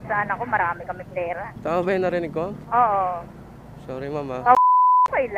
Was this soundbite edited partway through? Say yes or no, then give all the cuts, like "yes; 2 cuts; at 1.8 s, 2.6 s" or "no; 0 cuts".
yes; 2 cuts; at 1.5 s, 2.6 s